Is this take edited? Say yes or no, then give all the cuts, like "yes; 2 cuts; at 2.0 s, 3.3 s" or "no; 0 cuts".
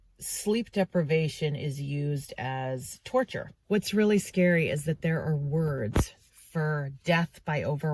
yes; 1 cut; at 3.6 s